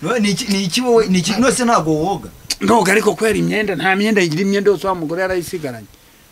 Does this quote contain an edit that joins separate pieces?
no; 0 cuts

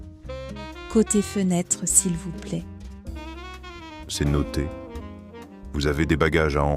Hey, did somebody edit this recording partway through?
yes; 1 cut; at 0.9 s

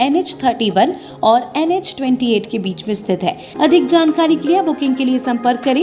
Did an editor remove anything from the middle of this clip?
yes; 1 cut; at 3.5 s

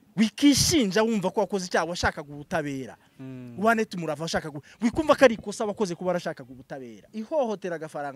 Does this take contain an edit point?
yes; 1 cut; at 7.1 s

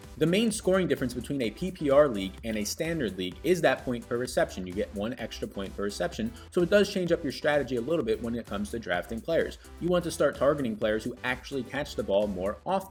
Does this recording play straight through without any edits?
yes; 0 cuts

